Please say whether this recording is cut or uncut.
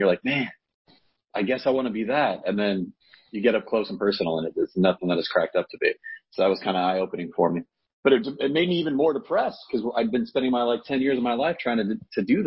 uncut